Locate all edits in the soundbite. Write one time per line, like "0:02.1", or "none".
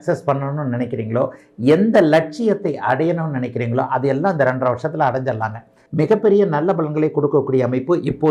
0:05.8